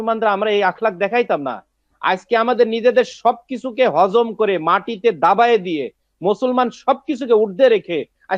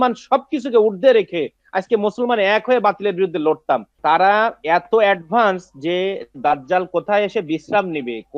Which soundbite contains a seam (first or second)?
second